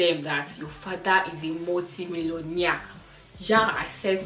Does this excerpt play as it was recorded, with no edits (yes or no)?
yes